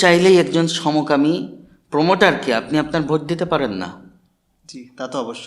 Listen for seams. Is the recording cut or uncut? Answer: uncut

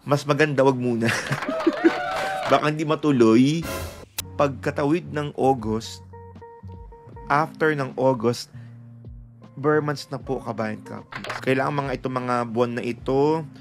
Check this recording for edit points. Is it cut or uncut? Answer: cut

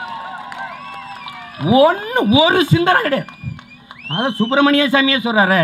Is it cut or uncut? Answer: uncut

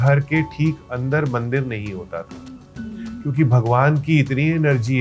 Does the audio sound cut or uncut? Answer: uncut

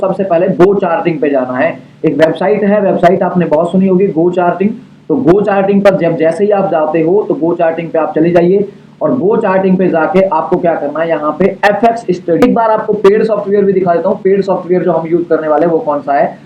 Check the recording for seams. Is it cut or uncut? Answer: cut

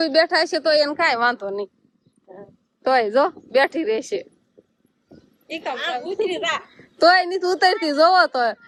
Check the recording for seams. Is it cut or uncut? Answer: uncut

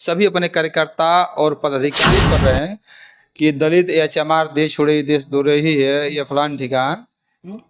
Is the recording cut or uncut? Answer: cut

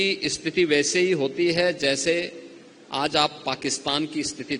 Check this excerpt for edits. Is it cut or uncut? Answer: uncut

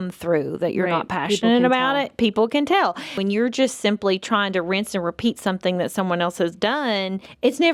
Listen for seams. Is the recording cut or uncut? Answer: uncut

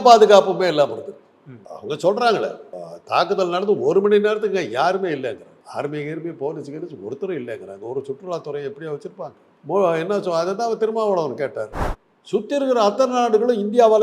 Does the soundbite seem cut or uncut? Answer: cut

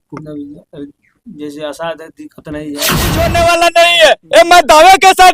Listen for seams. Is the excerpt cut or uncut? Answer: cut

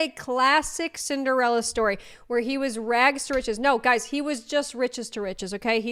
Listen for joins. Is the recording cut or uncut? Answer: uncut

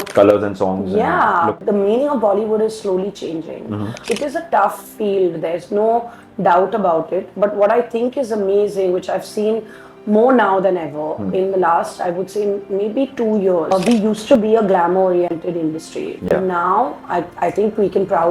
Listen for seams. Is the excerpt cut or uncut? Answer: cut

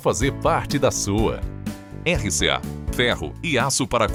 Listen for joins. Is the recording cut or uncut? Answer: uncut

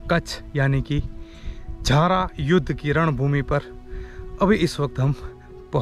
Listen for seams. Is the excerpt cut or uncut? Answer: uncut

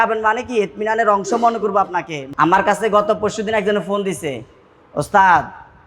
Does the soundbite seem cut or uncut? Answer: cut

